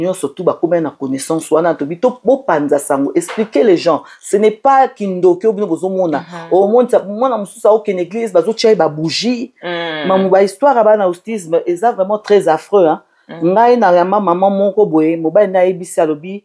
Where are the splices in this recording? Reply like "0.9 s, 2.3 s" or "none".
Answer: none